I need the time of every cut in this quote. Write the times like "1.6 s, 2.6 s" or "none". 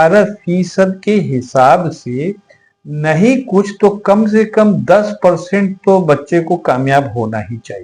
none